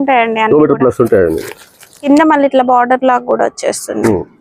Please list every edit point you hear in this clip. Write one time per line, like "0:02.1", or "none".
0:02.0